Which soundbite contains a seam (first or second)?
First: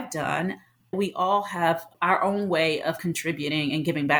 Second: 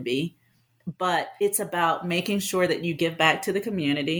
first